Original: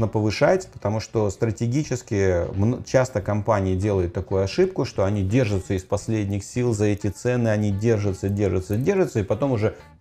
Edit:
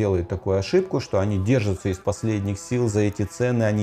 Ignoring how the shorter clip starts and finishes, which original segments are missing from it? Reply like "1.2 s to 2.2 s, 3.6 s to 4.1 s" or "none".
none